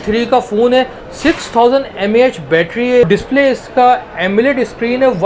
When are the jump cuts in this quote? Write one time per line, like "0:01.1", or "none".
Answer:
0:03.0